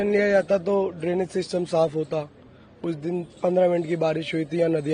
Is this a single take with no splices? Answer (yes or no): yes